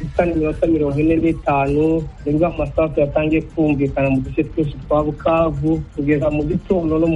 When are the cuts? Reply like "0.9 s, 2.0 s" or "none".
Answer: 2.1 s, 5.9 s